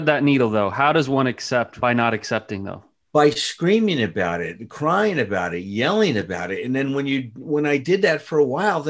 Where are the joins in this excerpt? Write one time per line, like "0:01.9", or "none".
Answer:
0:01.8